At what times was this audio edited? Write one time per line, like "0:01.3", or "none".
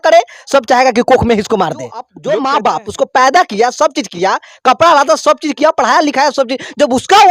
0:02.1